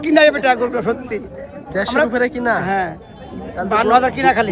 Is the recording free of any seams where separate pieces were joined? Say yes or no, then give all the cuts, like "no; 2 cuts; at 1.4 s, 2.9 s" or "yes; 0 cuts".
yes; 0 cuts